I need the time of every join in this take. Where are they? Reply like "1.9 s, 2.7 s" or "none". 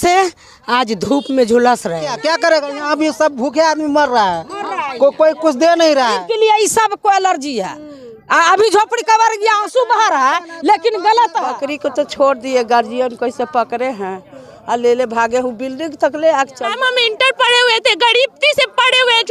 2.2 s, 6.3 s, 11.6 s, 16.6 s